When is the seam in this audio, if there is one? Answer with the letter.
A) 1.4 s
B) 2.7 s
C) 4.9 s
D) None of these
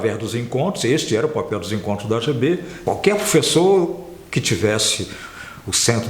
B